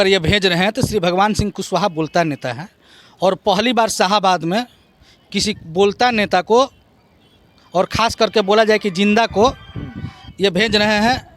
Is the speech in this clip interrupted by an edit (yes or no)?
no